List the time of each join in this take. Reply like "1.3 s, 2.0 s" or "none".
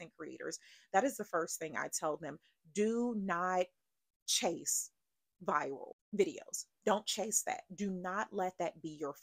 5.9 s